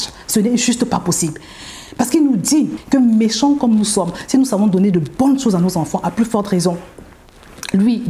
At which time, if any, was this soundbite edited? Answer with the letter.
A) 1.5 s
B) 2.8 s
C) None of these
B